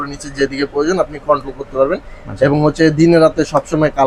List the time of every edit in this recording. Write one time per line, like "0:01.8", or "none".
none